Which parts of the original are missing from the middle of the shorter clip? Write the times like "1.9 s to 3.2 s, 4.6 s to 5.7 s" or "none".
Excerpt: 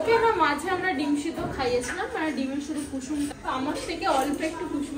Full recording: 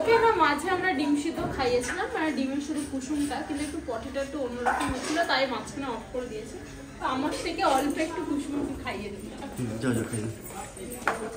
3.3 s to 6.9 s